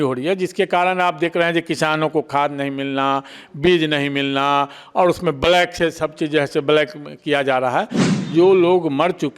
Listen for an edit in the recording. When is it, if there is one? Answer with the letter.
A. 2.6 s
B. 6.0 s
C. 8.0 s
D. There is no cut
C